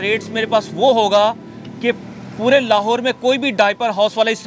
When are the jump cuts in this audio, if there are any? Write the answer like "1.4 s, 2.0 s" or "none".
none

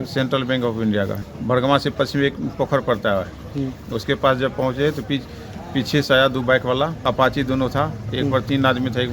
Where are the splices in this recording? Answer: 1.2 s, 7.0 s

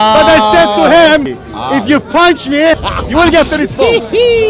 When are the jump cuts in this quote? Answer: 1.3 s, 2.9 s

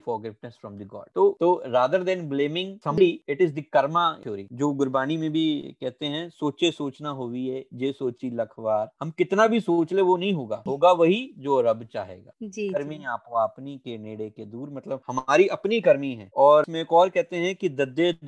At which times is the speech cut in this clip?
3.0 s, 10.6 s

